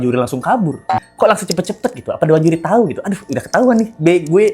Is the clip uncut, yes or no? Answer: no